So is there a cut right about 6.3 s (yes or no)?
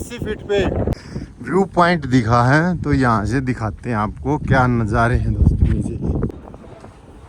yes